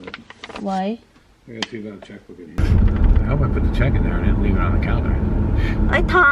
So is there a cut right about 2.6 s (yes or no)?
yes